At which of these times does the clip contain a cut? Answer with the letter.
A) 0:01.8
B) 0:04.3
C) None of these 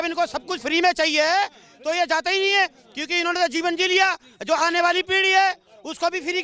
C